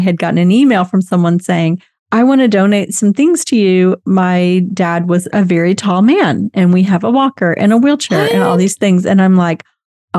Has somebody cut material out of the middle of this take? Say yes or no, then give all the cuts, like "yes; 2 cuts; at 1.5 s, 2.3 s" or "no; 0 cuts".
no; 0 cuts